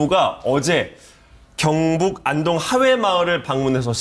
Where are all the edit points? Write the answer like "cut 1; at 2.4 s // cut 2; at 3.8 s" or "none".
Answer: none